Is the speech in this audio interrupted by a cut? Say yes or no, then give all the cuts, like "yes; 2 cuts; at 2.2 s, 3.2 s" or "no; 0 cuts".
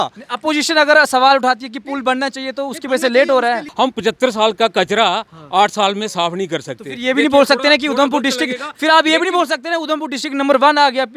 yes; 1 cut; at 3.7 s